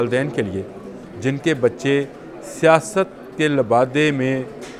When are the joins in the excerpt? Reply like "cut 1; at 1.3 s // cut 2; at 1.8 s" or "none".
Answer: none

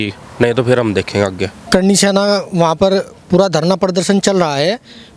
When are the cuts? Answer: cut 1; at 1.6 s

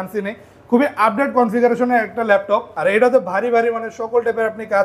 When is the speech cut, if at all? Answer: cut 1; at 2.7 s

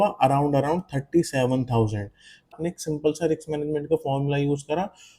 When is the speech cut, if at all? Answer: cut 1; at 2.5 s

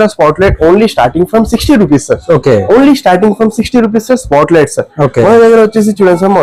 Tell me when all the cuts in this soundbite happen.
none

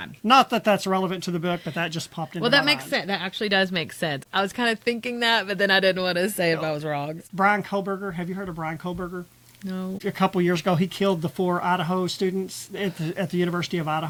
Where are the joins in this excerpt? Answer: none

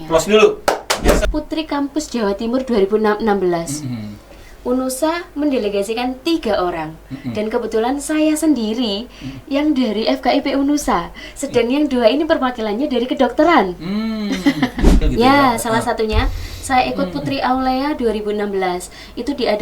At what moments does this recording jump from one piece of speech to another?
cut 1; at 1.2 s // cut 2; at 15.0 s

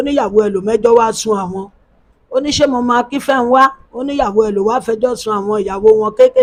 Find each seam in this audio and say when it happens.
none

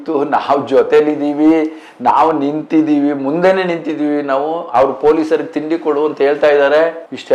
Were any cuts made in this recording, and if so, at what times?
none

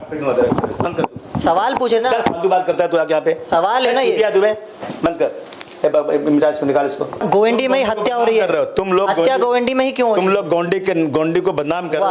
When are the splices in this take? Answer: cut 1; at 7.2 s

